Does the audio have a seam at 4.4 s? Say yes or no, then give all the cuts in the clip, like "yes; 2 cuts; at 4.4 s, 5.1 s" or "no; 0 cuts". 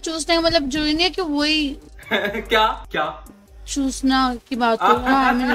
no; 1 cut; at 2.8 s